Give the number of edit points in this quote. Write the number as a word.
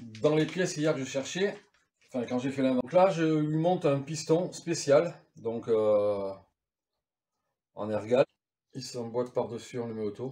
two